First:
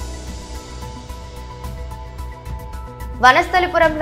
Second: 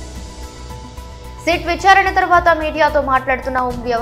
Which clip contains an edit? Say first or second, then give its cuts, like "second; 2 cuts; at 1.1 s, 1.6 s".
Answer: first; 2 cuts; at 1.3 s, 2.7 s